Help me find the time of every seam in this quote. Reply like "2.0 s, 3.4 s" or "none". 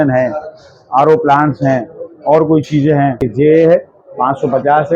3.3 s